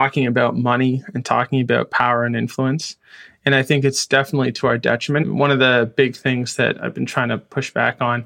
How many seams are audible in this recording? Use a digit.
1